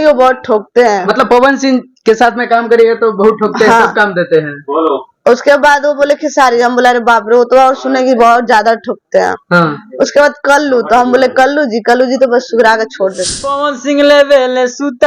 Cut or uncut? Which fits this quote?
cut